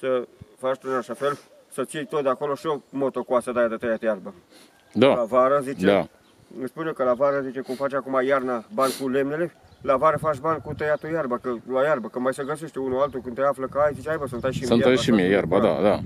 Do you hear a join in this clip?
no; 0 cuts

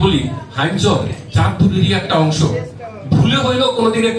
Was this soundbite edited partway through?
no; 0 cuts

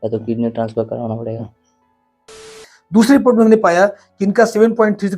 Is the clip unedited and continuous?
no; 1 cut; at 2.5 s

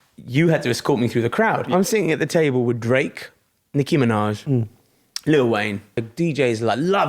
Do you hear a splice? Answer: yes; 2 cuts; at 1.6 s, 6.1 s

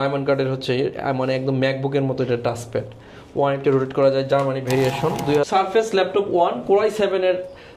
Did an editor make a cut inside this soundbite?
yes; 1 cut; at 5.5 s

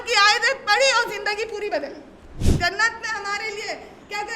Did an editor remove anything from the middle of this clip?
yes; 1 cut; at 2.4 s

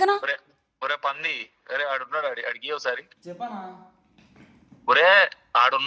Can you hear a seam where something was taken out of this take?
no; 0 cuts

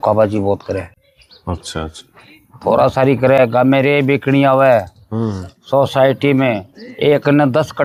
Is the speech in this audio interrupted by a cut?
no; 0 cuts

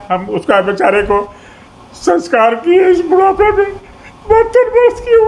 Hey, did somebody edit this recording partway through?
no; 0 cuts

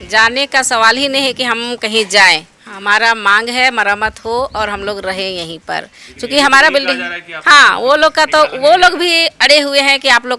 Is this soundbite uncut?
yes; 0 cuts

